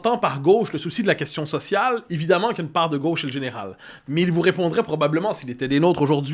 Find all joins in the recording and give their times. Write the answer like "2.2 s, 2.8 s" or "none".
none